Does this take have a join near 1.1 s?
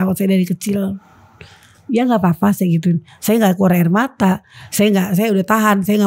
no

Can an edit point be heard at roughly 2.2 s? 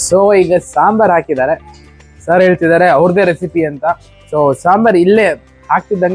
no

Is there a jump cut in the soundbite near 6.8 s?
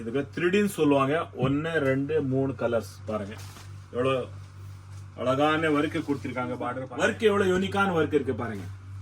yes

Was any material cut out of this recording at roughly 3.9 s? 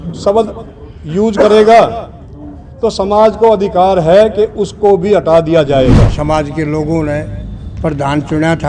no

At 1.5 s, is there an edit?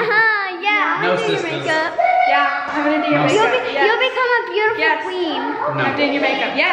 no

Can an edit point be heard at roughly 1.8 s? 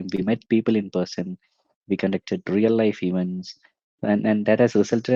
no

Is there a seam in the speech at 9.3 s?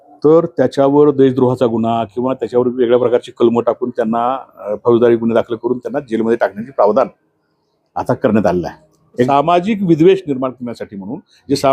yes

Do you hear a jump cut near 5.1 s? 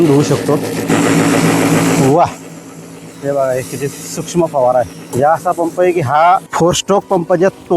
yes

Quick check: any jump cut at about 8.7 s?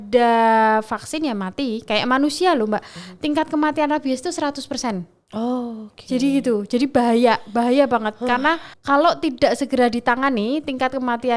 yes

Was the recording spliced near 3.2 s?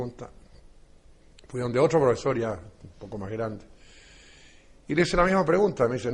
no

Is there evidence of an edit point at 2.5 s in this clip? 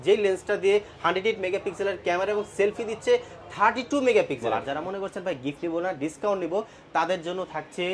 no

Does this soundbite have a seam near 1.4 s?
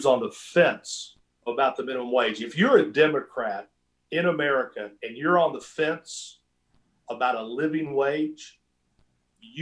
yes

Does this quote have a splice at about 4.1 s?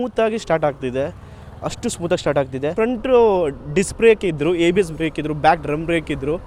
no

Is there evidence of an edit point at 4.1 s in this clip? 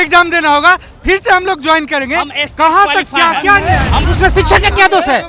yes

